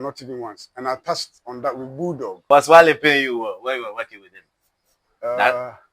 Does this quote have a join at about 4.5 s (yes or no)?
no